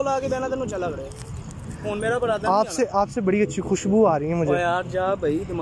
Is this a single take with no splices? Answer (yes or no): no